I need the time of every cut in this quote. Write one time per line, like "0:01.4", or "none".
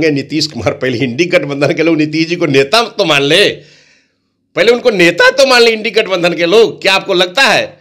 none

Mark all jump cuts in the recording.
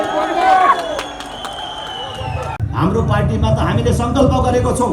0:02.5

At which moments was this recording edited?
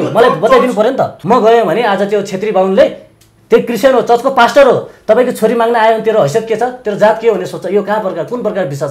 0:01.2

